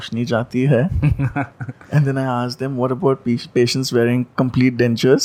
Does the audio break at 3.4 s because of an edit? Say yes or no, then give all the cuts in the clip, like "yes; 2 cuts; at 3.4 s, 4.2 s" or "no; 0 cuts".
no; 0 cuts